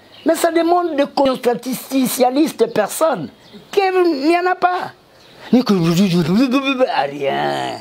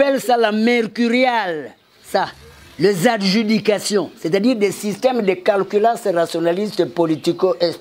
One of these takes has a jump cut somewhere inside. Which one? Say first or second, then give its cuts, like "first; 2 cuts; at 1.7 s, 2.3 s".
first; 1 cut; at 1.2 s